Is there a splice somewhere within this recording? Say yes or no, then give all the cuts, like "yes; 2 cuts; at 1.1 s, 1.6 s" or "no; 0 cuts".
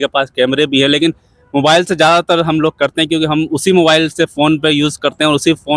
no; 0 cuts